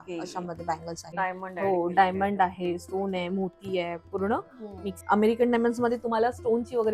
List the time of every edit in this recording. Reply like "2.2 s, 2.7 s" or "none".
1.1 s, 4.9 s